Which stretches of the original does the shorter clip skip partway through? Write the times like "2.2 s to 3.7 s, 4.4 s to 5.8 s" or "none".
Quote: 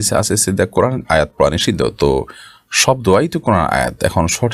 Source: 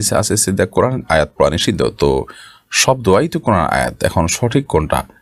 none